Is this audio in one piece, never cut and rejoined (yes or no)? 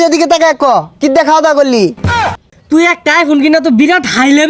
no